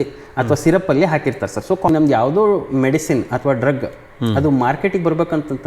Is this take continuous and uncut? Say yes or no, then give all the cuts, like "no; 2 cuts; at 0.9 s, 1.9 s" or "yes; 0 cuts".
no; 1 cut; at 1.9 s